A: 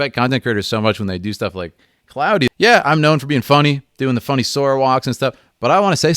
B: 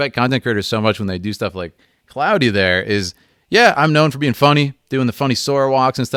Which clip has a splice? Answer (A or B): A